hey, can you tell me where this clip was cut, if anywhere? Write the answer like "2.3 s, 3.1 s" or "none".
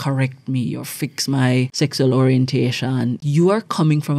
1.7 s, 3.2 s